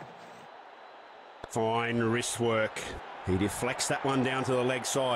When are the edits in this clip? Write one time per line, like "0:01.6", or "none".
0:01.5